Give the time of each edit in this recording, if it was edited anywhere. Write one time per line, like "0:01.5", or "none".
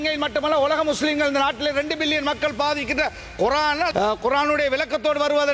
0:03.9